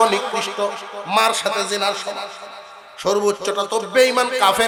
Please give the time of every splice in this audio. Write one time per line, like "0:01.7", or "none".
none